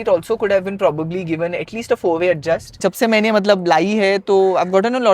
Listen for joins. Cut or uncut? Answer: cut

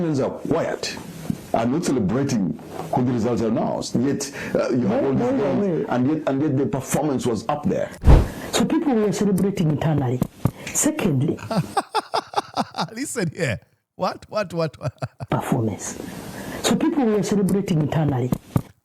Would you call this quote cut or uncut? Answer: cut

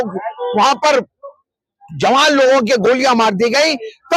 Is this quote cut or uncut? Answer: uncut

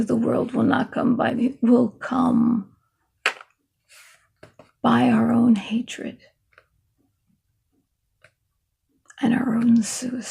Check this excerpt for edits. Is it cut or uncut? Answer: cut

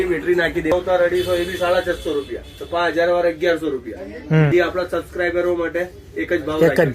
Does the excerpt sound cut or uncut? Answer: cut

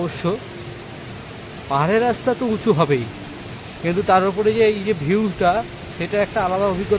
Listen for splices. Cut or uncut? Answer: uncut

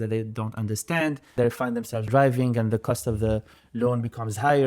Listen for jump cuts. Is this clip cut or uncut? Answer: cut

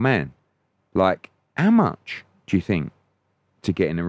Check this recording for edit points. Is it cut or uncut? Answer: uncut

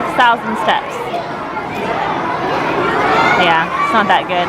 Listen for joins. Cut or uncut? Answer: uncut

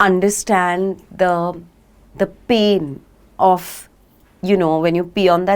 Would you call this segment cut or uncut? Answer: uncut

